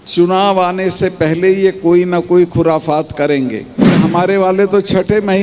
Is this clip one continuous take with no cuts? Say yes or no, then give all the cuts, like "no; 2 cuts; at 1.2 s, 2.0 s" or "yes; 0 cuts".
no; 1 cut; at 4.0 s